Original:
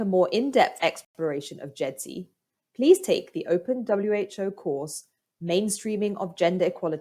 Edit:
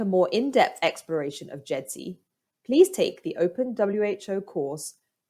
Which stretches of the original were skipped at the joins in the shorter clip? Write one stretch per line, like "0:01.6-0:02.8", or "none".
0:01.0-0:01.1

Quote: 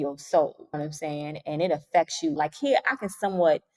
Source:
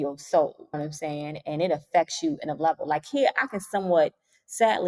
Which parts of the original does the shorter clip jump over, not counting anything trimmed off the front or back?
0:02.3-0:02.9

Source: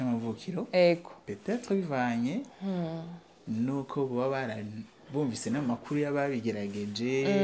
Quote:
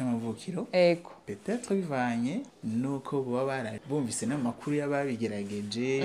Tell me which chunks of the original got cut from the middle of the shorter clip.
0:02.5-0:03.4
0:04.6-0:05.0

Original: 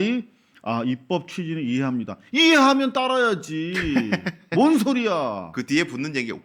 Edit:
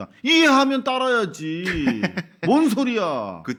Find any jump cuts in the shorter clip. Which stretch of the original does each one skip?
none

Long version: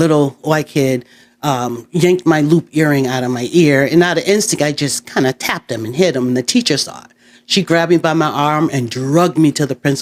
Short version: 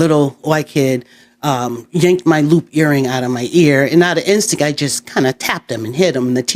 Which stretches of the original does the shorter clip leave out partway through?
none

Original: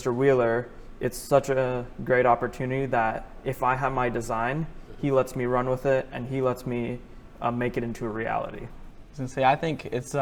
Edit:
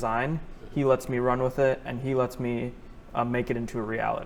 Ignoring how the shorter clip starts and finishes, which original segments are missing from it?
none

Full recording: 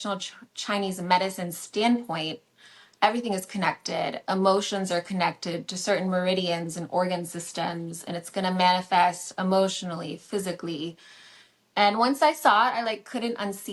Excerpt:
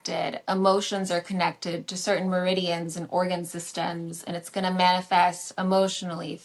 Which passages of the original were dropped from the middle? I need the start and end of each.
none

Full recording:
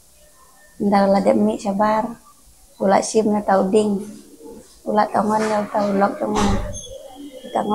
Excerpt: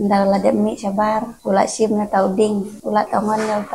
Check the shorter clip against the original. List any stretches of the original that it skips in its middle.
0:02.1-0:02.7
0:04.1-0:04.8

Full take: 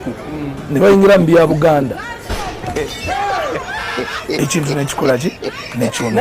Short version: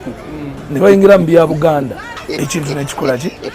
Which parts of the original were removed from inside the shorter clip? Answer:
0:02.1-0:04.1

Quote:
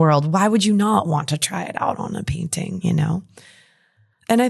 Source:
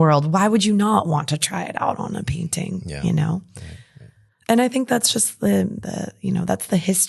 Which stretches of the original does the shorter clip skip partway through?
0:02.8-0:03.0

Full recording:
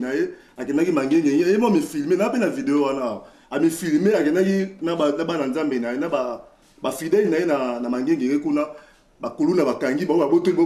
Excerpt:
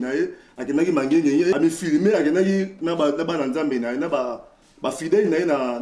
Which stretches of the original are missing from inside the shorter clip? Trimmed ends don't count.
0:01.5-0:03.5

